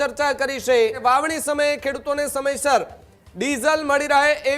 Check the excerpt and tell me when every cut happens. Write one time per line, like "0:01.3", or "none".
0:01.0

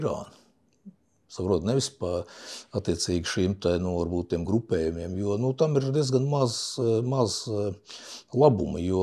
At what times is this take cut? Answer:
none

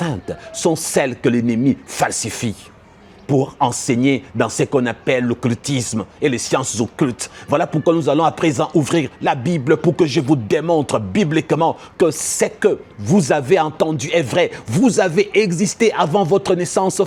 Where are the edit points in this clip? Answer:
none

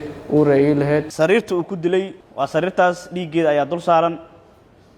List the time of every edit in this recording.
0:01.1
0:02.2

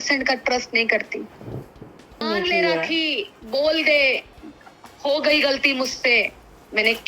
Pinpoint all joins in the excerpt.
0:02.2

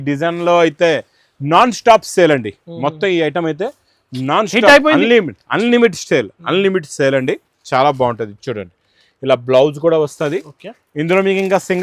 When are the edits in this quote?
none

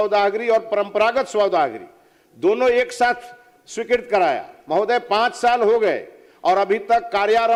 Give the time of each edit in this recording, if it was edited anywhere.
none

